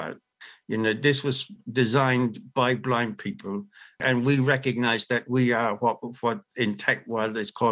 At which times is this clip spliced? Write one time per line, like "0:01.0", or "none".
0:04.0